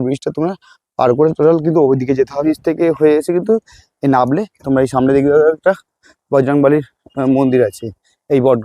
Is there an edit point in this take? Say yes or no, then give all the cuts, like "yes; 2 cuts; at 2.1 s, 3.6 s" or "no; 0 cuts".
yes; 1 cut; at 2.4 s